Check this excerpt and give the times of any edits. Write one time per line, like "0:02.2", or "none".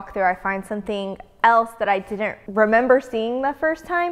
0:02.4